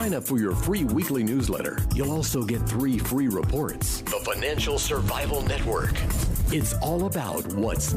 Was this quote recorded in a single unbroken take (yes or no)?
yes